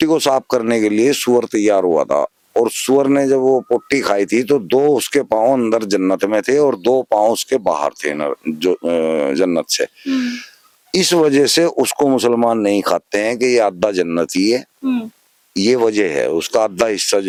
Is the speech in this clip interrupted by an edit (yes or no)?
no